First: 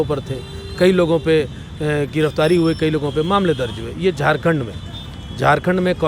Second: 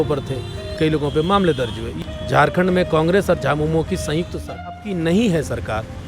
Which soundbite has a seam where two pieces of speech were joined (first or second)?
second